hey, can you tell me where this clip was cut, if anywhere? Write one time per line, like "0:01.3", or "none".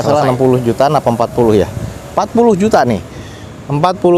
none